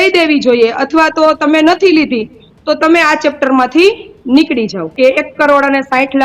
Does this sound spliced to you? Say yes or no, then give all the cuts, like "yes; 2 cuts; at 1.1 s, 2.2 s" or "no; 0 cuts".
yes; 1 cut; at 4.9 s